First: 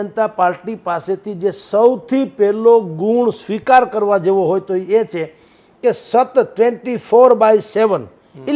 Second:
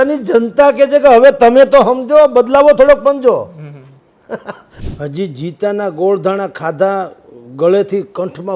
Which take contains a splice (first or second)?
second